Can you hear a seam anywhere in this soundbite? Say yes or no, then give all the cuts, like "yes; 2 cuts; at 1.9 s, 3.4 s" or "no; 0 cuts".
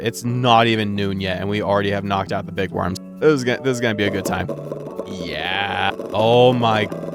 yes; 1 cut; at 3.0 s